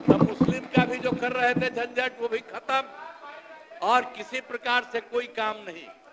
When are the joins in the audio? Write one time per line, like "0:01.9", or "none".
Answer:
none